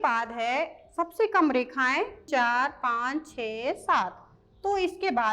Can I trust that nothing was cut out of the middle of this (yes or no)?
no